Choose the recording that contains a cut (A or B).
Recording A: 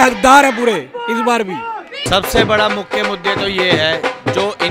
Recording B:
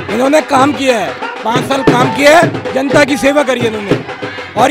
A